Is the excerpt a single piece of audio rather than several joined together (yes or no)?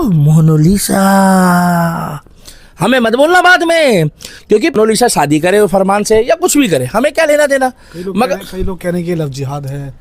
no